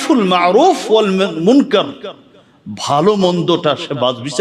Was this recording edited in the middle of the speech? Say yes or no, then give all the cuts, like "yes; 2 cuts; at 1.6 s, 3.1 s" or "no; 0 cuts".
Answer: no; 0 cuts